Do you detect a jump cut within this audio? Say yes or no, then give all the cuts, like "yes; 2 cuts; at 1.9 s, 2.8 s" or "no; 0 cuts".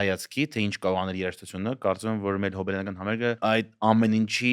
yes; 1 cut; at 3.4 s